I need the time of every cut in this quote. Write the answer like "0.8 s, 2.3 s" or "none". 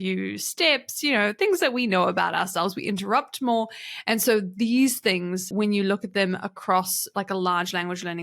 5.5 s